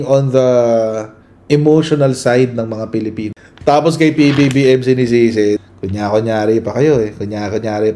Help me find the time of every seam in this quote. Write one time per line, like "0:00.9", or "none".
0:03.3
0:05.7